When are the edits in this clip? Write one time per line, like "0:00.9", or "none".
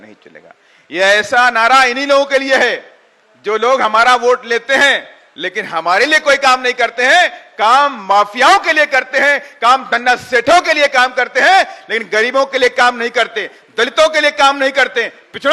none